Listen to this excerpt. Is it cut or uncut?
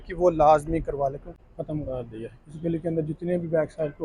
cut